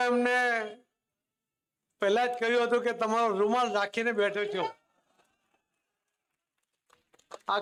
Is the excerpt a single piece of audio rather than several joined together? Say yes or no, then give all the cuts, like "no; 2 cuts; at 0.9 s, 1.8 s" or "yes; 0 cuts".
yes; 0 cuts